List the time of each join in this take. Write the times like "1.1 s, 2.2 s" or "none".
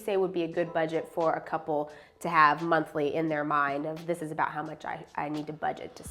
none

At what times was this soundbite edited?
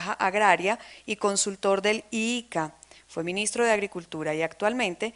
1.8 s

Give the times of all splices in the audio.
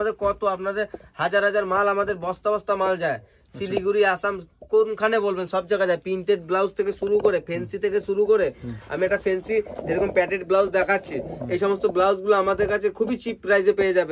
none

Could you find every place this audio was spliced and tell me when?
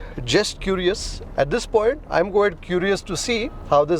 1.2 s, 2.0 s

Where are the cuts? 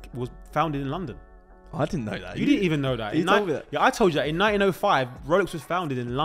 none

